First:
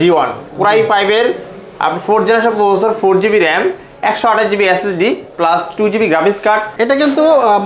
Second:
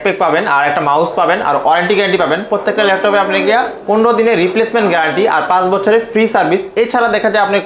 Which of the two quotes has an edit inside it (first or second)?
first